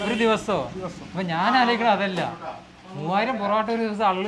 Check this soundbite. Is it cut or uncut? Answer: uncut